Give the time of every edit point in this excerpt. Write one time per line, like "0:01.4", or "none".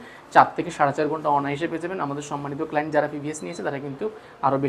none